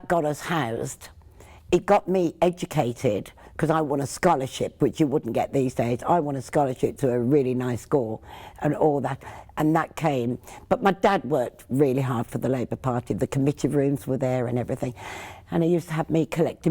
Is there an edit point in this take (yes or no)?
no